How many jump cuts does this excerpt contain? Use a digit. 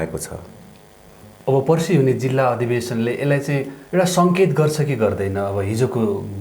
1